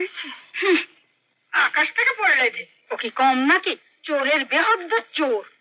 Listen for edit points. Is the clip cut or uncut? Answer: uncut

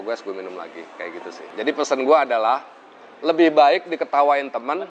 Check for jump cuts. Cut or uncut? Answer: cut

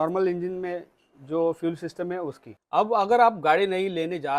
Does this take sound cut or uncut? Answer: cut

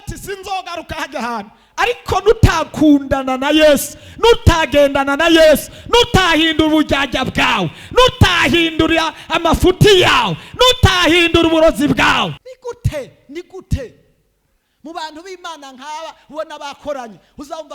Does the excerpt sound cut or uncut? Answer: cut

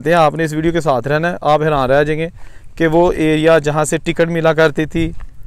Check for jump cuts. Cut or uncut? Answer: uncut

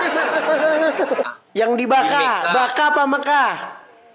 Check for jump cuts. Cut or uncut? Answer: cut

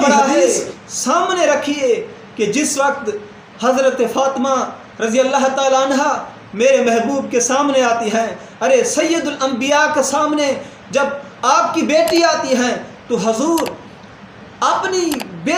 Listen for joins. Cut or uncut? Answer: uncut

